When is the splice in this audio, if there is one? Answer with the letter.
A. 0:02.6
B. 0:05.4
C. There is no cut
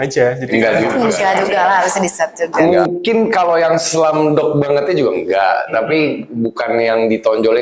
A